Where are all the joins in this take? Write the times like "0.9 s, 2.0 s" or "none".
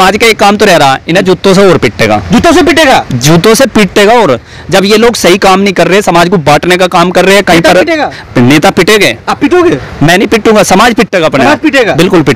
none